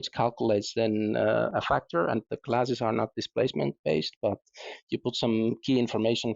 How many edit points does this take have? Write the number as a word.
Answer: one